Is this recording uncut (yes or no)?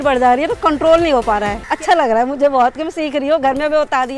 no